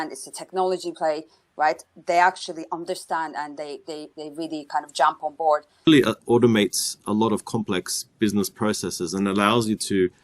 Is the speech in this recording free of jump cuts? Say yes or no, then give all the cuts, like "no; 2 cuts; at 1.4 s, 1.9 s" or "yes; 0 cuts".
no; 1 cut; at 5.9 s